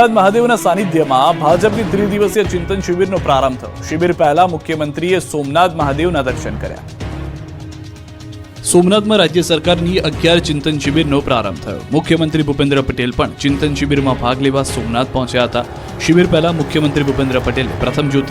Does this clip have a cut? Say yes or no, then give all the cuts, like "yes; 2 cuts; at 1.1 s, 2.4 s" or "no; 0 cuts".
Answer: no; 0 cuts